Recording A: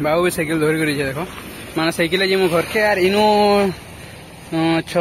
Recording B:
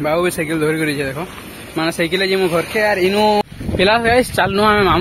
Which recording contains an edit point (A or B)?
B